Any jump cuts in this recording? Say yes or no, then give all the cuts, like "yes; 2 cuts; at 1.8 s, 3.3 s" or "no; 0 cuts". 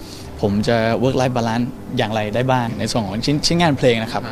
yes; 1 cut; at 2.7 s